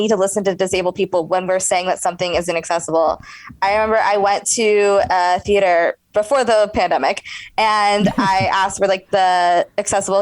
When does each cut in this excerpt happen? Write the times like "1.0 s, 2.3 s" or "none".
6.0 s

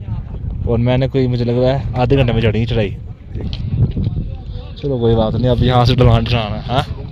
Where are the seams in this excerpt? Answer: 3.7 s

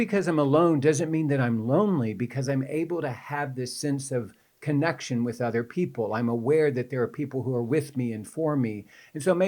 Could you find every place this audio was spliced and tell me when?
none

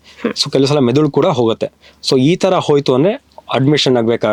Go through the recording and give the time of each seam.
none

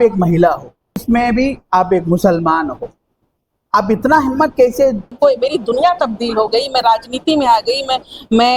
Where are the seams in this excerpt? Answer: 1.0 s, 5.1 s

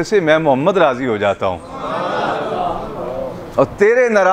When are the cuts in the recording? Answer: none

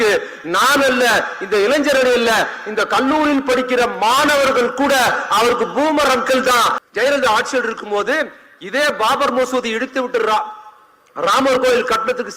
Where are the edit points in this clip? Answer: 6.8 s

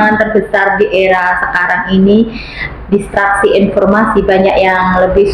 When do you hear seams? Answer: none

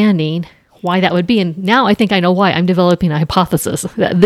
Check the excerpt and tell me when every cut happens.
none

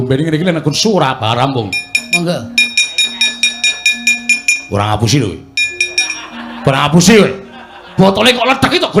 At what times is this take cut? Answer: 2.0 s

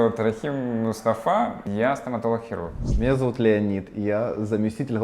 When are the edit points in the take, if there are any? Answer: 1.6 s

